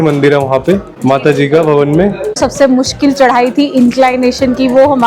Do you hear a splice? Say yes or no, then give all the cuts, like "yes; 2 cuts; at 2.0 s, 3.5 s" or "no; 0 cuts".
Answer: yes; 2 cuts; at 0.9 s, 2.4 s